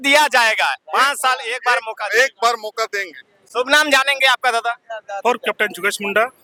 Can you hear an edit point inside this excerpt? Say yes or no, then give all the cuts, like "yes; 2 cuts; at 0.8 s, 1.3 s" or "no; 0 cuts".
no; 0 cuts